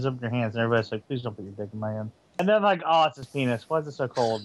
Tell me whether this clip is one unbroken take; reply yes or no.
no